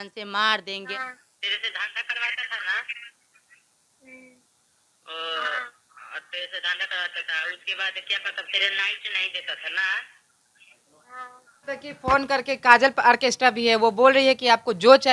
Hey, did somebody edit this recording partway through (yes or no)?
yes